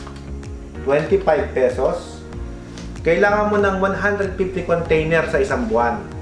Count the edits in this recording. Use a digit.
0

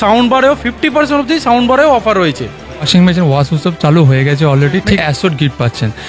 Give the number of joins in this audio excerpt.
2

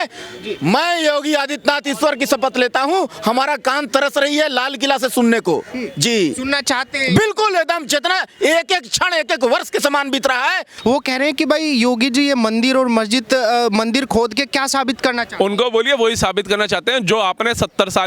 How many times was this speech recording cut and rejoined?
1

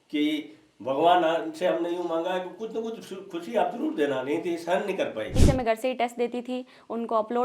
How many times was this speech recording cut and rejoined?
1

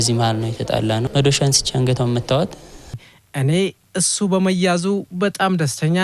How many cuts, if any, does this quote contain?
2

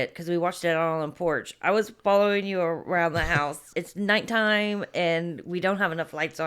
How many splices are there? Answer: 1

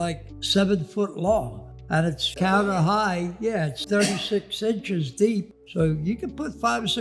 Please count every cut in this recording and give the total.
1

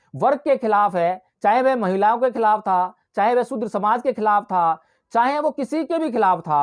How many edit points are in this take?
0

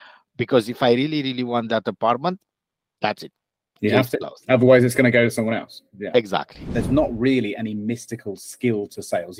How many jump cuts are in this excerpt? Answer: 1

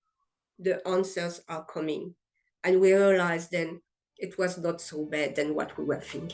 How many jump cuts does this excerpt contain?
0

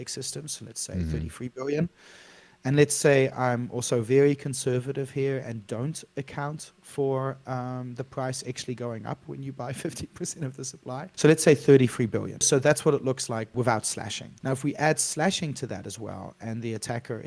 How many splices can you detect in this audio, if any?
4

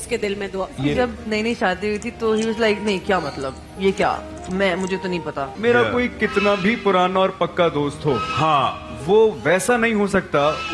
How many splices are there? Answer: 2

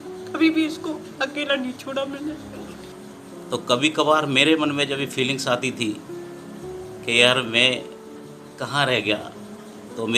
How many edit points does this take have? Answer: 1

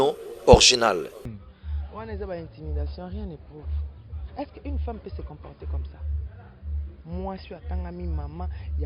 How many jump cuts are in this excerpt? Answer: 1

